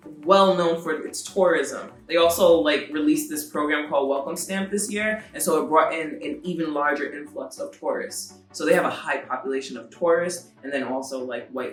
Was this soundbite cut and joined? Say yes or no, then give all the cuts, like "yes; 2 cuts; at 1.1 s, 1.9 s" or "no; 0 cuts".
no; 0 cuts